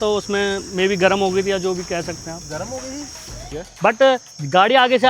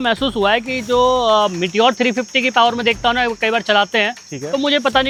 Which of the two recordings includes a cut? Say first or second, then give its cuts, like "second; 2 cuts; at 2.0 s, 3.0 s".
first; 1 cut; at 3.6 s